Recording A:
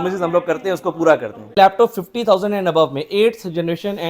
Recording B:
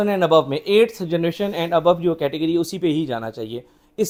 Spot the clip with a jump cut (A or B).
A